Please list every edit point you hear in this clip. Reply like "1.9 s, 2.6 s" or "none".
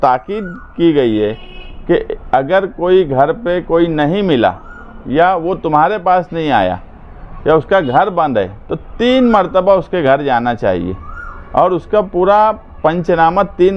none